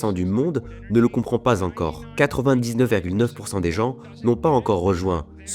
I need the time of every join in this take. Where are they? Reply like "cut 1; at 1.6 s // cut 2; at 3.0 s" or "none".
cut 1; at 2.0 s